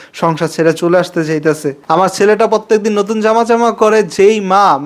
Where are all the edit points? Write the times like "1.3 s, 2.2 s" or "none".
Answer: 1.8 s